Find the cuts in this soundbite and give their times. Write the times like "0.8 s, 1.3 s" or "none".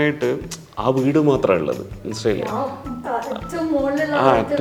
none

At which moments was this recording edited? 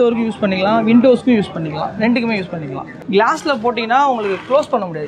2.9 s

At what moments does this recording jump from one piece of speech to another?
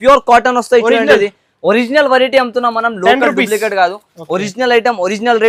none

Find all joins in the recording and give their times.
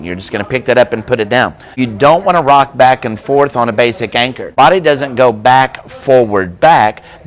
1.8 s, 4.5 s

